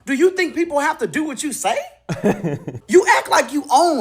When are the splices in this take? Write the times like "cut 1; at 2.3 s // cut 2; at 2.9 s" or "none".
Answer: cut 1; at 2.8 s